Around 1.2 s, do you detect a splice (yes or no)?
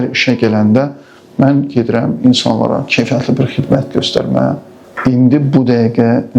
no